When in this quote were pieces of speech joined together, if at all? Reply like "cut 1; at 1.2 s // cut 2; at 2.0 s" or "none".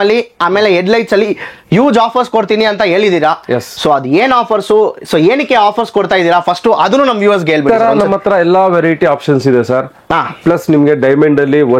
cut 1; at 7.6 s